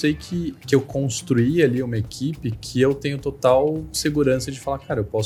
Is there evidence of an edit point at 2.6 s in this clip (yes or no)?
no